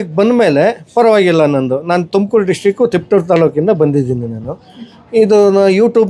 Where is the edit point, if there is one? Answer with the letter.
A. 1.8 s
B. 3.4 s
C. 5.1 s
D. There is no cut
D